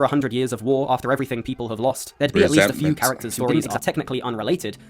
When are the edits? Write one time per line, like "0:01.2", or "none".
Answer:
0:03.7

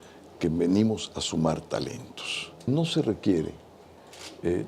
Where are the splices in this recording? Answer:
0:02.7

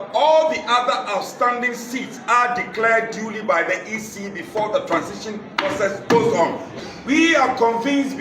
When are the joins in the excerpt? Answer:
0:06.7

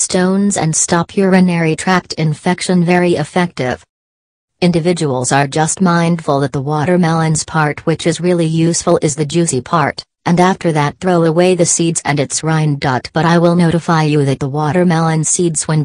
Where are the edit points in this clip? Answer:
none

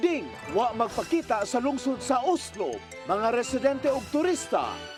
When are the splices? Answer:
none

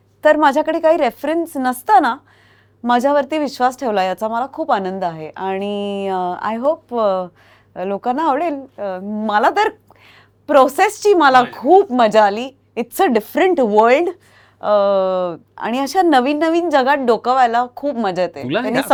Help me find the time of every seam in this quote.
none

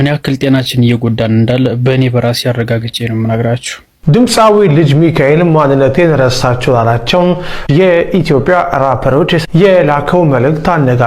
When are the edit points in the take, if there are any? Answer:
0:04.0

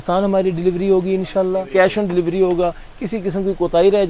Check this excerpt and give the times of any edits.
0:01.6

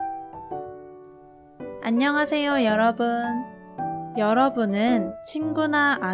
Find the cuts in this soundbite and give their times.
0:01.8

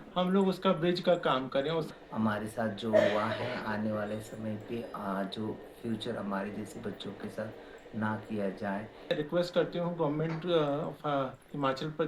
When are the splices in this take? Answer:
0:01.9
0:09.1

